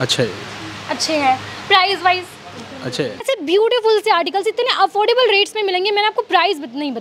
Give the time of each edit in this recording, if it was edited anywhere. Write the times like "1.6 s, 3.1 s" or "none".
3.2 s